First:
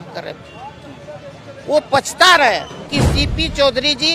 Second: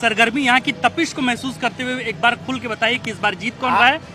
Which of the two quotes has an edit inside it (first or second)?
first